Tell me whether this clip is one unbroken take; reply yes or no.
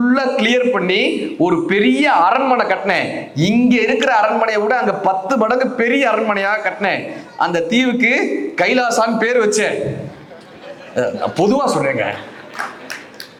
yes